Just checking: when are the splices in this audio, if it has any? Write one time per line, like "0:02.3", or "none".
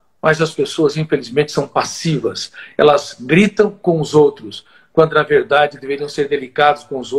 none